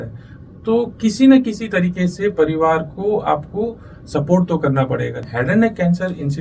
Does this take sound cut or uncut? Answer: cut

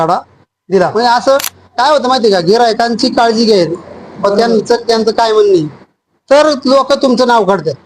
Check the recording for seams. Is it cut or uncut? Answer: cut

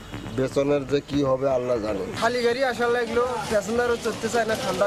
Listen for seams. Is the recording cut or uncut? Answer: uncut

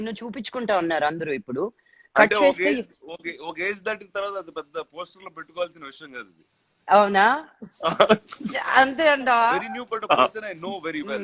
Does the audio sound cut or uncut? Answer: cut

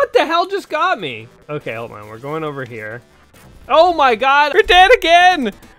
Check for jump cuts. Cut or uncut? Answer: cut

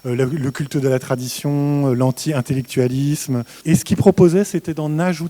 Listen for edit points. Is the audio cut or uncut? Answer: cut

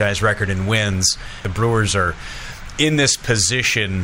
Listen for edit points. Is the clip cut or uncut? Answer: cut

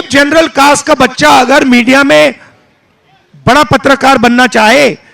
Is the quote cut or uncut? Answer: uncut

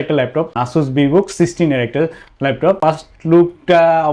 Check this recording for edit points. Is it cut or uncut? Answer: uncut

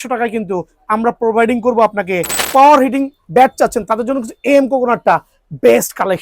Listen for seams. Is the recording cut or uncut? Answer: cut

